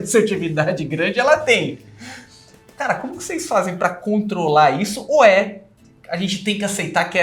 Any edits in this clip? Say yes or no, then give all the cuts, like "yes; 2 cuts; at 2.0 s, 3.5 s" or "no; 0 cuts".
no; 0 cuts